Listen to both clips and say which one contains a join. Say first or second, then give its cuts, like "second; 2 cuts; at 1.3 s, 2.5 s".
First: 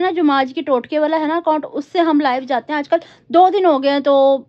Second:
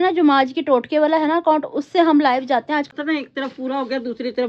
second; 1 cut; at 2.9 s